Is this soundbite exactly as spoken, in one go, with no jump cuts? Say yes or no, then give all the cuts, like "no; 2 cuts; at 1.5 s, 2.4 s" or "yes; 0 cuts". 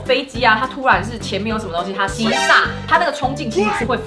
yes; 0 cuts